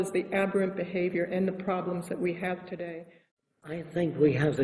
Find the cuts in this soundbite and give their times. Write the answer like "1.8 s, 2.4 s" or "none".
3.7 s